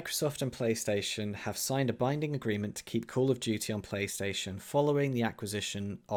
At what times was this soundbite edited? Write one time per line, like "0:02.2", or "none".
none